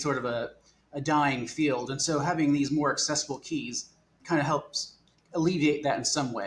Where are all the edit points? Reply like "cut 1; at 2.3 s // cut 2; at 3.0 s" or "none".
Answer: none